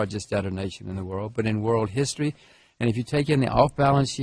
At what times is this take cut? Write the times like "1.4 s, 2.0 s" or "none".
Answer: none